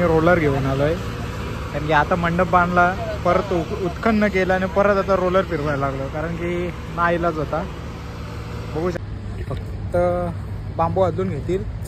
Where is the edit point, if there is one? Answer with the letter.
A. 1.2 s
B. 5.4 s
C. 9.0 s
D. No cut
C